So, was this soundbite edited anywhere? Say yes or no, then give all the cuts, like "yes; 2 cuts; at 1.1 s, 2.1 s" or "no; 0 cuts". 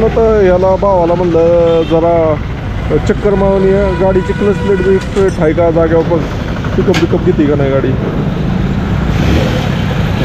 no; 0 cuts